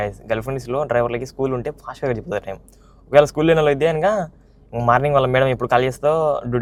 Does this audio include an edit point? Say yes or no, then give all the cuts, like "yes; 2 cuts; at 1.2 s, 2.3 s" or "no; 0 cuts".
no; 0 cuts